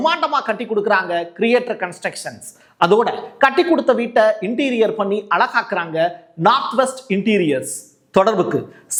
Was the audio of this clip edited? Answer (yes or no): no